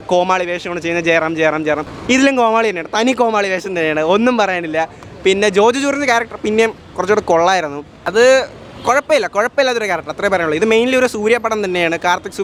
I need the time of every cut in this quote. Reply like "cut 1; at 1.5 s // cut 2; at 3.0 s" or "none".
none